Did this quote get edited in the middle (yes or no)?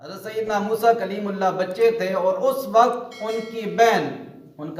no